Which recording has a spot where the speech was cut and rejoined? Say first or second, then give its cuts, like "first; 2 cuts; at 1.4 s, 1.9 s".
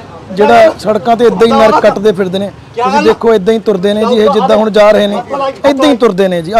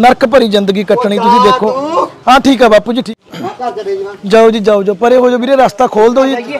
second; 1 cut; at 3.1 s